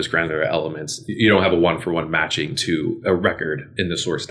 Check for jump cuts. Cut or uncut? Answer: uncut